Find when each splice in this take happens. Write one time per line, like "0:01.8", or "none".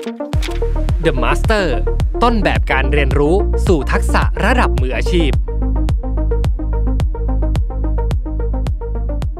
none